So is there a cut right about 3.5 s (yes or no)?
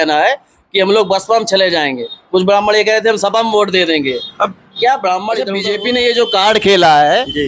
no